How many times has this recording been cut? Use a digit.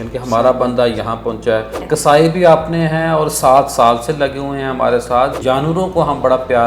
2